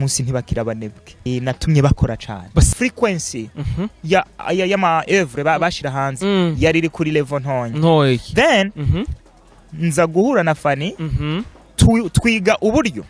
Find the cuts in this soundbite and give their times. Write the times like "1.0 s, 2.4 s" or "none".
1.3 s, 2.7 s